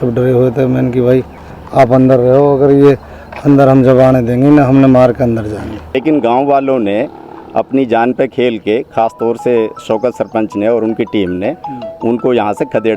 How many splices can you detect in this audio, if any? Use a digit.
1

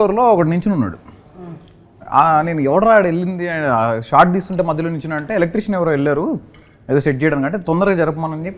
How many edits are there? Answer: 0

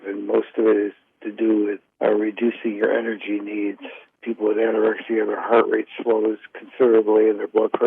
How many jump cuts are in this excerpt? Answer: 1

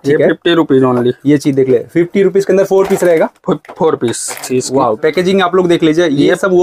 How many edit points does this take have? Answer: 1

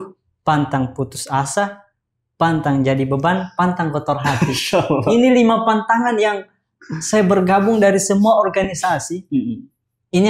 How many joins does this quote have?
0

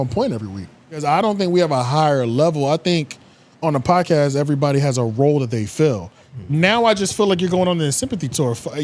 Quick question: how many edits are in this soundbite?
2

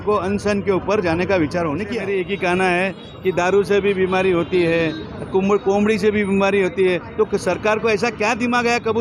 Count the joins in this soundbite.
1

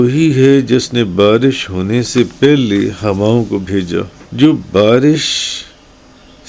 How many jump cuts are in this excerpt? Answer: 1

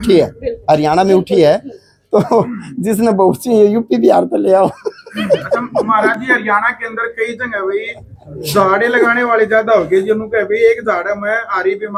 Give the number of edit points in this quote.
0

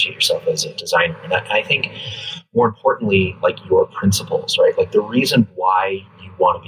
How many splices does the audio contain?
0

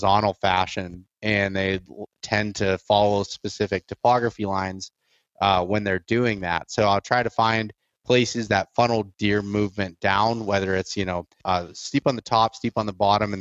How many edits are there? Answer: 1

